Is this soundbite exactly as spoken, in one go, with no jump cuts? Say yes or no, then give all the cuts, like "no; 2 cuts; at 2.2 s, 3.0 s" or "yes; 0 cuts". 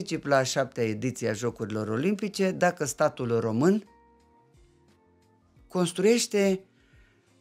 yes; 0 cuts